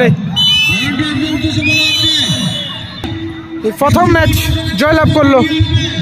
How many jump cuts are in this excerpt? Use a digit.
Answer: 0